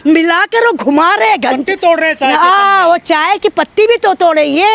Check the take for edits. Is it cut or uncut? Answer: uncut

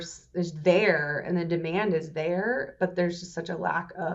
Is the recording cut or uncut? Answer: uncut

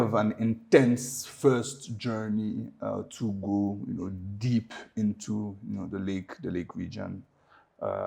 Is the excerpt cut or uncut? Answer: uncut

